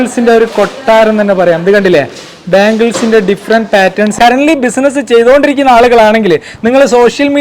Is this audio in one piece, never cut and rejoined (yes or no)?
no